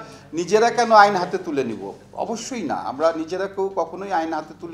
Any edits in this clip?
no; 0 cuts

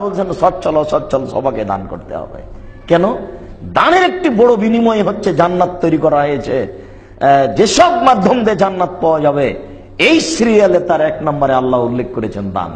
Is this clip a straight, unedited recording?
yes; 0 cuts

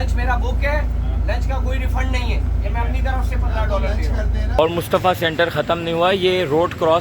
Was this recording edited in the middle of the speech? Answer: yes; 1 cut; at 4.6 s

